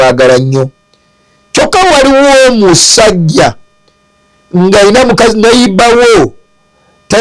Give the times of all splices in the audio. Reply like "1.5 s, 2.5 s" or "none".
none